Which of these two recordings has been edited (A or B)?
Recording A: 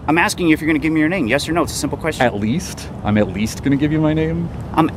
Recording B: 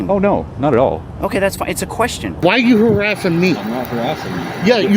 B